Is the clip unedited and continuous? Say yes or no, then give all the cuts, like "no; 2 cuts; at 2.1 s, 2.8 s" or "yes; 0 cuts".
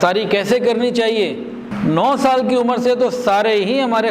no; 1 cut; at 1.7 s